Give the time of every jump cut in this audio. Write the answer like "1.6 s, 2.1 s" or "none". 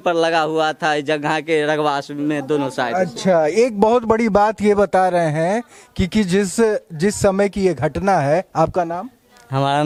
none

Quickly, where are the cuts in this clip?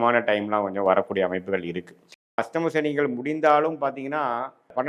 2.4 s

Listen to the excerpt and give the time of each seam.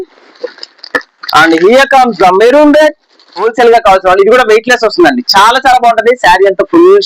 3.5 s

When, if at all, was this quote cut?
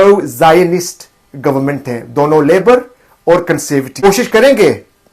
4.0 s

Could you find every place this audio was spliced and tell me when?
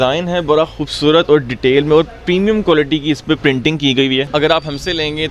4.3 s

